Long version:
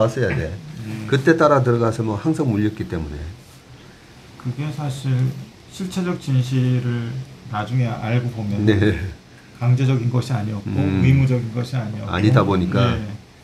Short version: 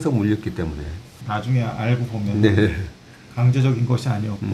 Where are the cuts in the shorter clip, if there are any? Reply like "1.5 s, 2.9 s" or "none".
1.1 s